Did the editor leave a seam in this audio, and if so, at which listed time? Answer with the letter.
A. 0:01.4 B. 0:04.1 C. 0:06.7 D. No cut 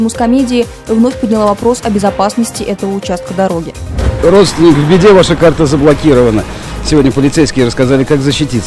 B